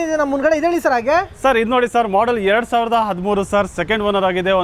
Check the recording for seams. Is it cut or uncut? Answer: uncut